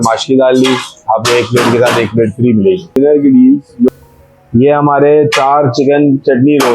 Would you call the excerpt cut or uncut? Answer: cut